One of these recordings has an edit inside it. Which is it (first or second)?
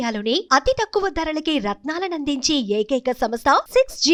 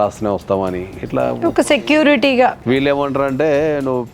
second